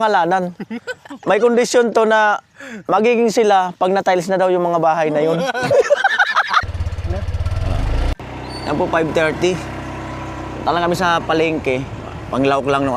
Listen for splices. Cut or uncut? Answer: cut